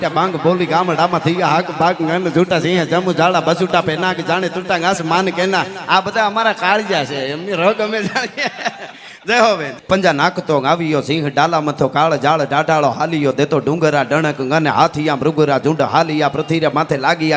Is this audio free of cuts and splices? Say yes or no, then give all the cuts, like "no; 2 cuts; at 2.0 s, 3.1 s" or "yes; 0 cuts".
no; 1 cut; at 9.7 s